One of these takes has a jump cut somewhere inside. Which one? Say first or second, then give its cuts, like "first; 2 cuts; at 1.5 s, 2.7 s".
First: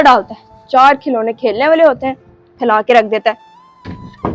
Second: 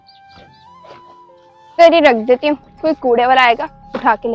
second; 1 cut; at 1.8 s